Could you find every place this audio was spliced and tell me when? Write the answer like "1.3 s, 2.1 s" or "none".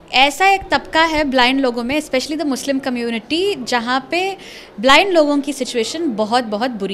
none